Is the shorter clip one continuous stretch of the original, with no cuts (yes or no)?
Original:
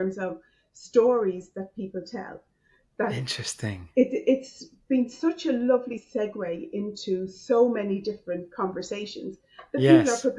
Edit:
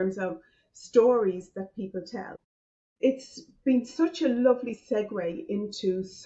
no